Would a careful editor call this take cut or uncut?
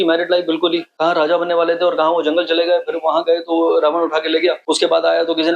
cut